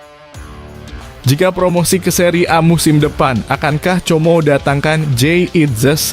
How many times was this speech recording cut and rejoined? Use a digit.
1